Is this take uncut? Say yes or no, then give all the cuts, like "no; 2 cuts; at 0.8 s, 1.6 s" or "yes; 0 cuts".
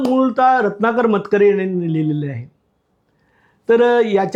yes; 0 cuts